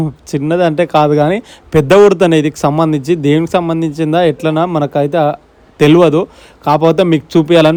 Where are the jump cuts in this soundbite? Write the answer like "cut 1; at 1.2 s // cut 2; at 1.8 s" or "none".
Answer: none